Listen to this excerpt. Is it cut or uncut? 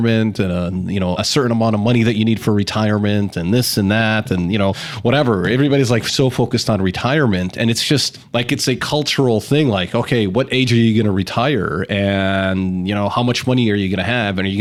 uncut